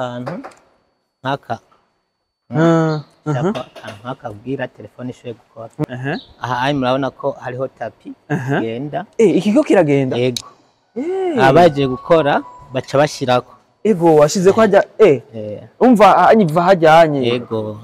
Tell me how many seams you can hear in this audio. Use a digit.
1